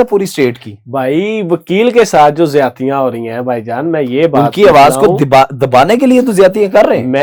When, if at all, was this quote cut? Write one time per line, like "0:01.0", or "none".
none